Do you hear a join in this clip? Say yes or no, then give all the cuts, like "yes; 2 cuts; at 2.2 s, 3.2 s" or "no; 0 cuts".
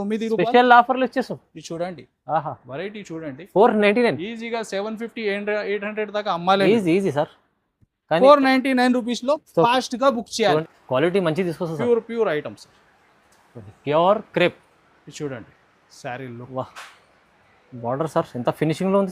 yes; 1 cut; at 10.6 s